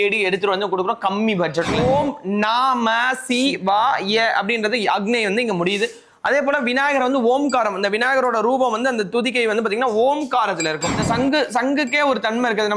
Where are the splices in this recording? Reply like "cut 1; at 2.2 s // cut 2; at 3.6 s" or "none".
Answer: cut 1; at 1.8 s // cut 2; at 11.0 s